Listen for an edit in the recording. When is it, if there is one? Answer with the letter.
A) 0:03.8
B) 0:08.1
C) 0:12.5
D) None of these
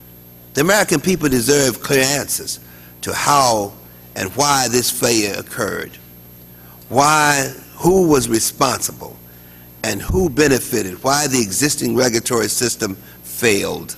C